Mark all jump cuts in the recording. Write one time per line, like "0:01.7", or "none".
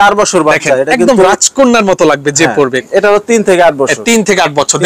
0:02.9

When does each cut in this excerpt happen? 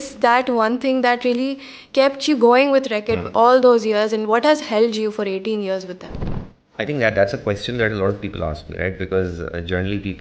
none

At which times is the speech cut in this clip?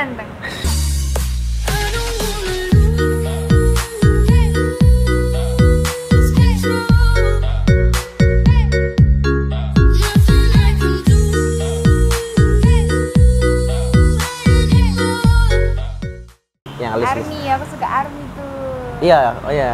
0:16.6

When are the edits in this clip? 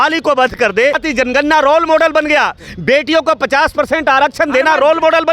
0:01.0

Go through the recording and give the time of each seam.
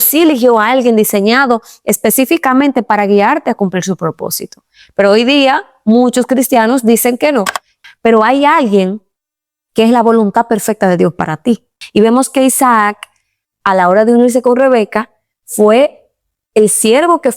0:07.7
0:11.8

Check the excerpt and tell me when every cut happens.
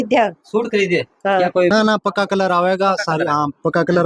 0:01.7

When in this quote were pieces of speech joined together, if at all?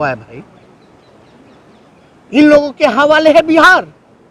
none

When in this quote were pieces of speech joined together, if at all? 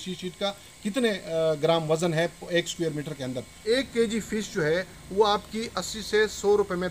0:03.6

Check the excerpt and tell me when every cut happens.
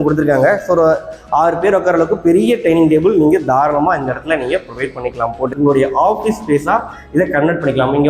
0:05.5

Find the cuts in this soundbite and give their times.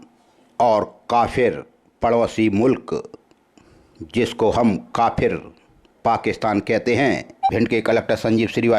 0:07.5

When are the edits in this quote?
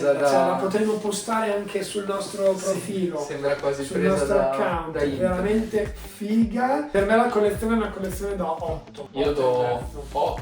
0:06.9
0:09.0

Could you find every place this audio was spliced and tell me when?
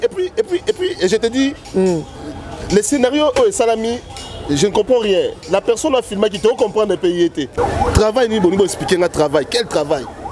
0:07.5

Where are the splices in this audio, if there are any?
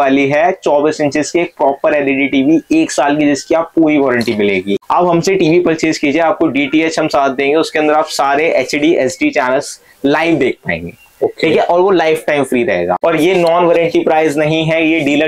0:04.8
0:13.0

